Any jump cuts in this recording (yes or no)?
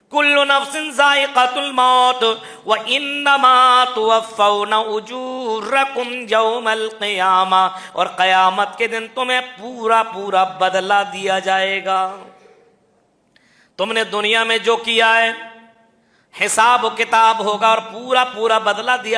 no